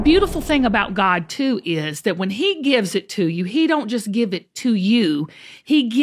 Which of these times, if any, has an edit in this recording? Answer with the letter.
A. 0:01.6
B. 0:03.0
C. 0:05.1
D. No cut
D